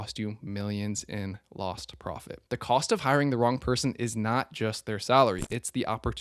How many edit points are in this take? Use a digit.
1